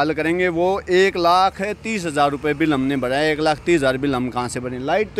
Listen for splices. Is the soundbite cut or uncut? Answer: uncut